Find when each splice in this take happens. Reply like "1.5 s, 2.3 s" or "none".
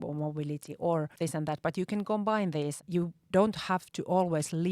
1.1 s, 2.8 s